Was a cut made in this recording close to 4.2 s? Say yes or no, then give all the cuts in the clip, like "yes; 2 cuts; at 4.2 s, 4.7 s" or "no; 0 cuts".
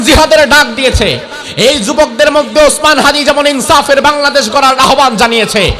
no; 0 cuts